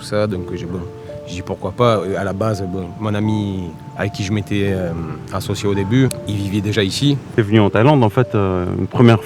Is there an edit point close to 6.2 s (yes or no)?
yes